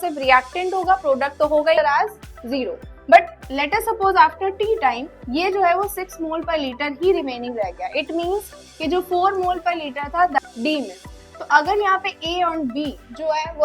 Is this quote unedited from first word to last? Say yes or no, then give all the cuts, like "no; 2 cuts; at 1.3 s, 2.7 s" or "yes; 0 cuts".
no; 2 cuts; at 1.8 s, 10.4 s